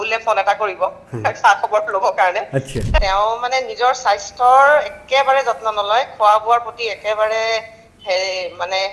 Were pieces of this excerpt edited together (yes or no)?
yes